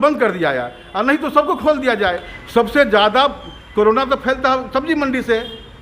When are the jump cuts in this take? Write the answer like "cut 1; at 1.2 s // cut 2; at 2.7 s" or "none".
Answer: cut 1; at 2.3 s